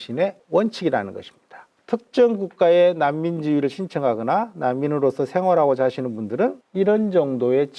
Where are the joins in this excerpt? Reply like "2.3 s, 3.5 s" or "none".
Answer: 1.8 s